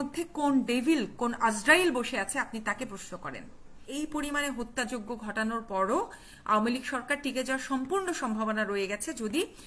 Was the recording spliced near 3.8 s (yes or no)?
yes